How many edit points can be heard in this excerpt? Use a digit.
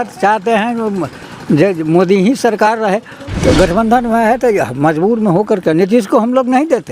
1